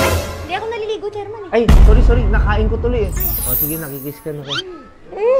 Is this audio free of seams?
no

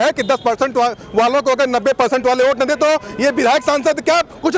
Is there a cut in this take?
no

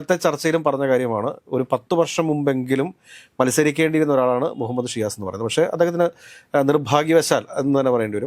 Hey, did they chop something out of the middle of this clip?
no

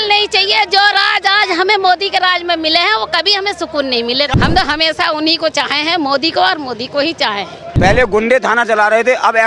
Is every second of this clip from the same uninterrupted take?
no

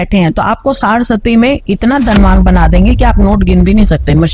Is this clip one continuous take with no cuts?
yes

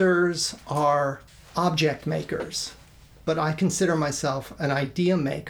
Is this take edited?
no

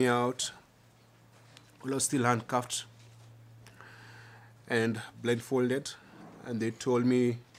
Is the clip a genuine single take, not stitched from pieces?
yes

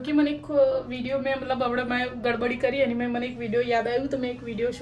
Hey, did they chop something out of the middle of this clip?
no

